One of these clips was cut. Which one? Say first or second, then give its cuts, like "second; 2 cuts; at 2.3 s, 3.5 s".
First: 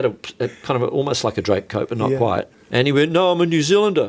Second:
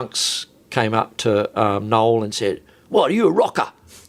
first; 1 cut; at 2.6 s